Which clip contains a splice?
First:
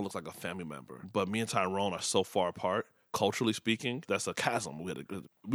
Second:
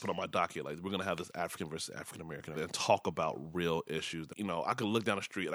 second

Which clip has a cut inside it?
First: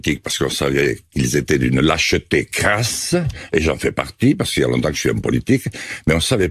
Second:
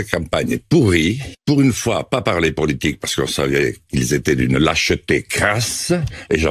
second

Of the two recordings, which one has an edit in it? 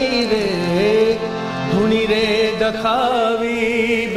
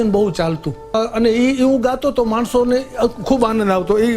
second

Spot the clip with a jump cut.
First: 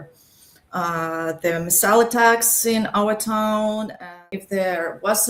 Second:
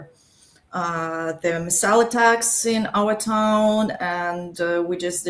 first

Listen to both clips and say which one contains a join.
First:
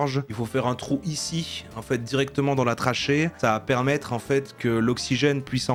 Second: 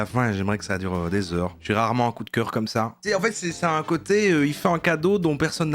second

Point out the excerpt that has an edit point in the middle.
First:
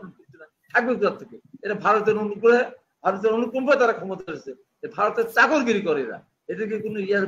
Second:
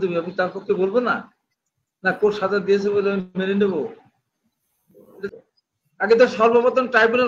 second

